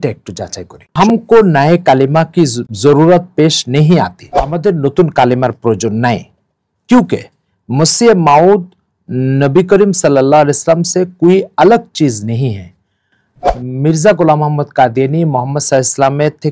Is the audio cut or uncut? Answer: cut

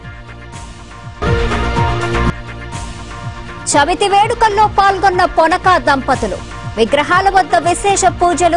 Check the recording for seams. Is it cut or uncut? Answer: cut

